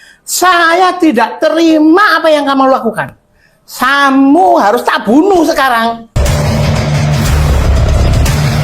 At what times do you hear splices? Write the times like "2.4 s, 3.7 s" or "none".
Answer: 6.2 s